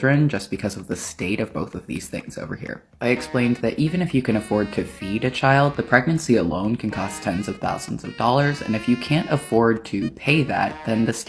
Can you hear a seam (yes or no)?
no